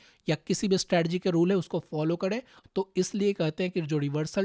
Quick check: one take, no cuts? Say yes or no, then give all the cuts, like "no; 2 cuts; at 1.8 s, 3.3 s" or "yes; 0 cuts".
no; 1 cut; at 2.6 s